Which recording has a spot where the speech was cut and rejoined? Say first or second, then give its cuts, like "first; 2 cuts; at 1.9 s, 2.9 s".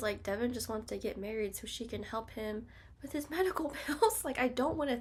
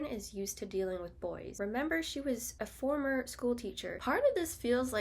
second; 1 cut; at 4.0 s